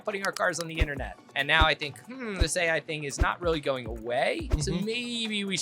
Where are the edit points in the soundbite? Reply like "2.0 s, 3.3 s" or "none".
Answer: 1.2 s, 4.5 s